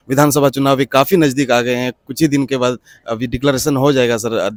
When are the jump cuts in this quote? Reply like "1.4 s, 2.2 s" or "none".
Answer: none